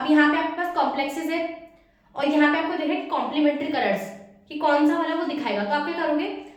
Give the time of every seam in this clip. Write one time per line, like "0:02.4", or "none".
none